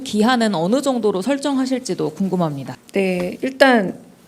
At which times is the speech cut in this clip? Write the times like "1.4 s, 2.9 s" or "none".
2.7 s